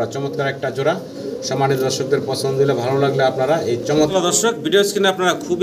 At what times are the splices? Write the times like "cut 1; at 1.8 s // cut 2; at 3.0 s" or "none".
cut 1; at 4.1 s